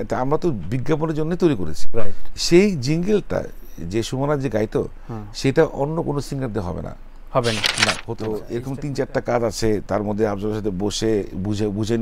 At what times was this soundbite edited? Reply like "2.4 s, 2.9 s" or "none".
8.2 s